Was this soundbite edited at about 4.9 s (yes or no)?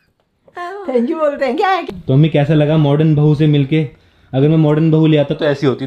no